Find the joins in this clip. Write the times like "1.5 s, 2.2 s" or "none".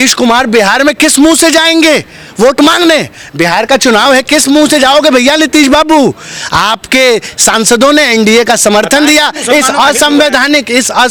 none

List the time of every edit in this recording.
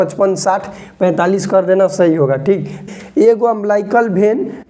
2.8 s

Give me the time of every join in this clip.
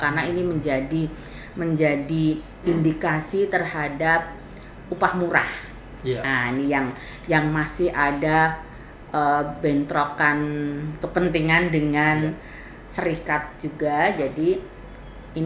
none

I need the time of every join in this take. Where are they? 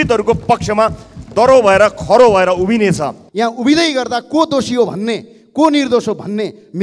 3.2 s

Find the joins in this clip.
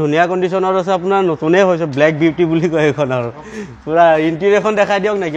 none

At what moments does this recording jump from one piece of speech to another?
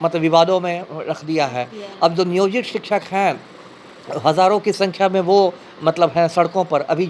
none

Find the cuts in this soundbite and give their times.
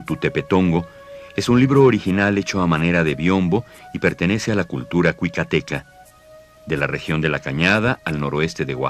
none

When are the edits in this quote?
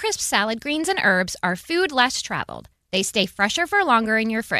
none

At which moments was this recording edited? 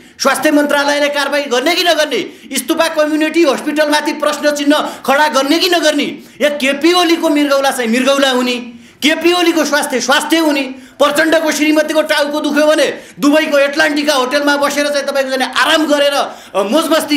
none

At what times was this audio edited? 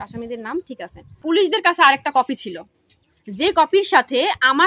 1.2 s

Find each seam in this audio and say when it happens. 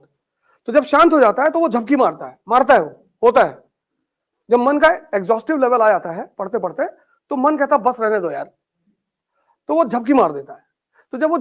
none

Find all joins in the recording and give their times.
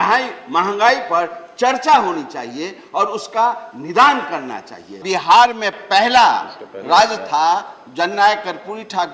5.0 s

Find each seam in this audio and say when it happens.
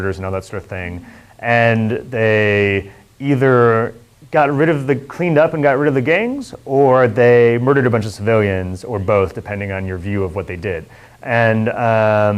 11.3 s

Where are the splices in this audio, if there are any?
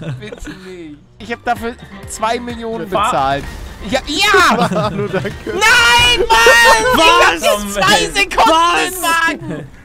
1.2 s

